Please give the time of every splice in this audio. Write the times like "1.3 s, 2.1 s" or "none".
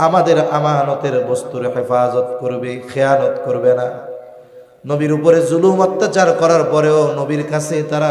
none